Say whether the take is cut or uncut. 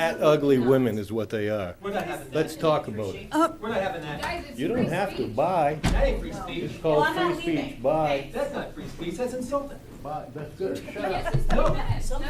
uncut